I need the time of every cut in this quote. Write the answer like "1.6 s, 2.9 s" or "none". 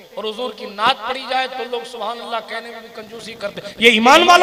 none